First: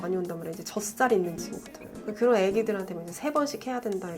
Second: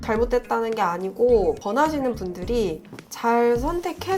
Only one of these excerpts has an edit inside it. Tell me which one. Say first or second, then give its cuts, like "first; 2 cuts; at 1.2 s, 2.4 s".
first; 1 cut; at 1.9 s